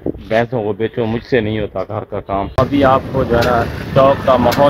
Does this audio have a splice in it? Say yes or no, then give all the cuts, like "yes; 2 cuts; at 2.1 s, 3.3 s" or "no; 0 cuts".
yes; 1 cut; at 2.5 s